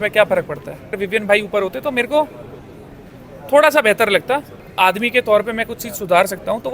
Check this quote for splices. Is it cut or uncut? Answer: cut